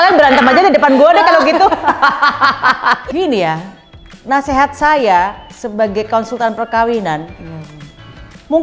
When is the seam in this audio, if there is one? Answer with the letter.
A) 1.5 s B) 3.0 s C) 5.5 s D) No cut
B